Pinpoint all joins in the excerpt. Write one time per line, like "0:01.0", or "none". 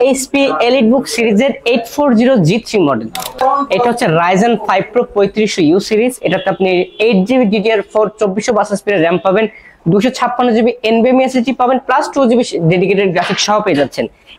0:03.3